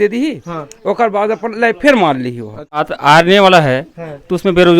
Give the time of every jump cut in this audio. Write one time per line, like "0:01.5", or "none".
0:02.8

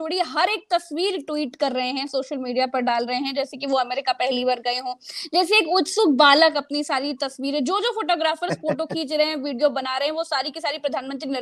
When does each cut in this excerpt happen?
none

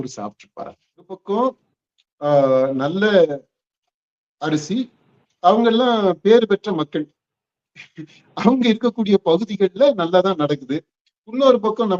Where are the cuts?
0:01.2

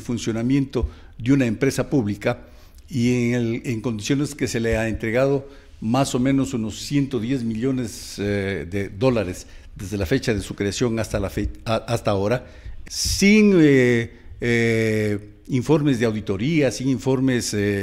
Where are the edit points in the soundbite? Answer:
0:12.7

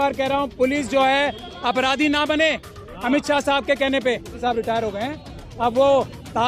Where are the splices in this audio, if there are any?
0:04.3

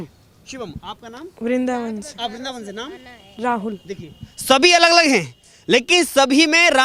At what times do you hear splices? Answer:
none

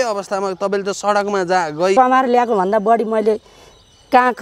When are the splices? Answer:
0:02.0

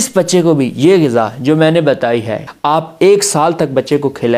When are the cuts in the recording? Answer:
0:02.4

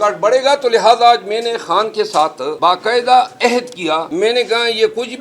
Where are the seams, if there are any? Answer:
0:02.5
0:04.1

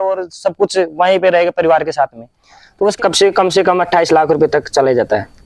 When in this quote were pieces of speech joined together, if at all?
0:02.9

